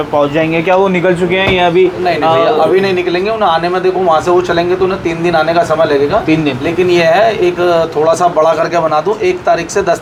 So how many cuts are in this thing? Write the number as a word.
zero